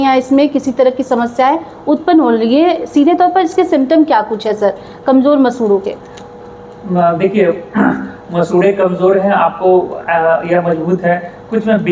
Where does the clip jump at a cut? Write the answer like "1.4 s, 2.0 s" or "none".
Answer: none